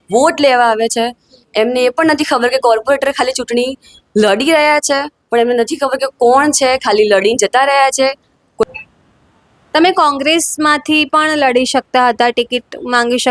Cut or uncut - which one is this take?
cut